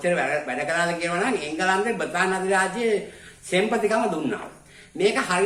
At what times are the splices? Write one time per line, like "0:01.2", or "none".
none